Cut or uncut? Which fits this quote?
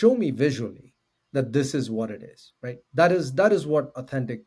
uncut